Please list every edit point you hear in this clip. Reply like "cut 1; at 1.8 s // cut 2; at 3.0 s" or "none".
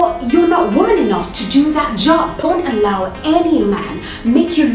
cut 1; at 2.4 s